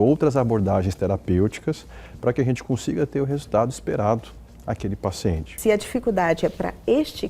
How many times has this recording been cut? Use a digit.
1